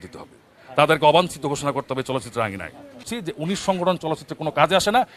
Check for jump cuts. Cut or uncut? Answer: cut